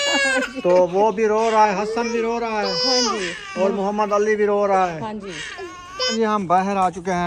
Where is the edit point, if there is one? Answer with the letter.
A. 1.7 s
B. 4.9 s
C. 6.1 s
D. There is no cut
C